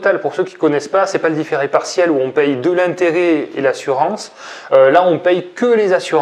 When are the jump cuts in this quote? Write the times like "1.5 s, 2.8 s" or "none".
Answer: none